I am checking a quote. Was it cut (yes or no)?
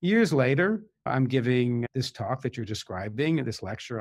yes